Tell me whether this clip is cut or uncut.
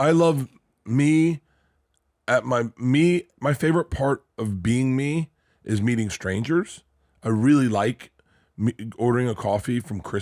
uncut